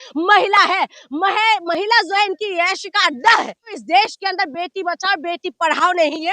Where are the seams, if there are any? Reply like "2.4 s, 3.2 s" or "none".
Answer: 3.7 s